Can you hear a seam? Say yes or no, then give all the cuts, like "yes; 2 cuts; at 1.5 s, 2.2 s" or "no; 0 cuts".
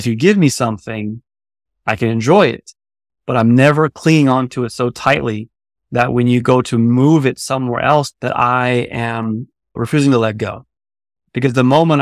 yes; 1 cut; at 8.1 s